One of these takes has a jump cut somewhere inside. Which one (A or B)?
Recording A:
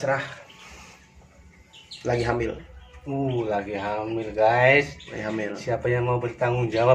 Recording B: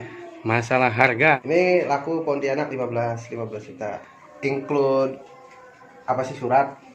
B